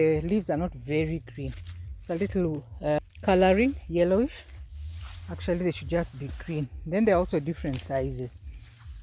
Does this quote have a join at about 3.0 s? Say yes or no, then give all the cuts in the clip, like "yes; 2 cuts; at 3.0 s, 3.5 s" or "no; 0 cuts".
yes; 1 cut; at 3.0 s